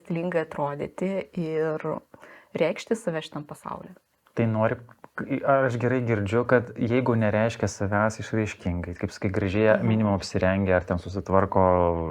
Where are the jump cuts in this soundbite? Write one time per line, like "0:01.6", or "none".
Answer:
none